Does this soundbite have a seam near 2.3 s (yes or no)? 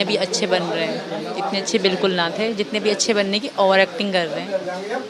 no